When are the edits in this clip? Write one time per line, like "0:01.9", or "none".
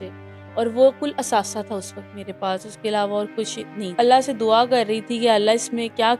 0:03.8